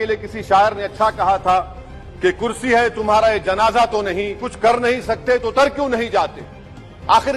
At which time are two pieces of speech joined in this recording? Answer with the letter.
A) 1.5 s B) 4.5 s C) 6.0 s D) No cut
B